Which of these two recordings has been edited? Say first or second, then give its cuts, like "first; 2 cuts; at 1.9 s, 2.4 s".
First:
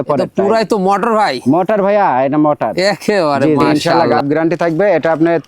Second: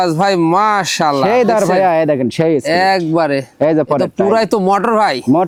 first; 1 cut; at 3.7 s